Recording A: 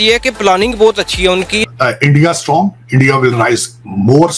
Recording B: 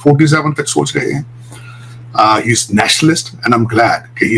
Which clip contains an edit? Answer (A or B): A